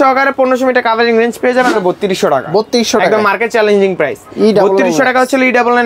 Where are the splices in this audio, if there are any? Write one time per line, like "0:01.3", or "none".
0:01.7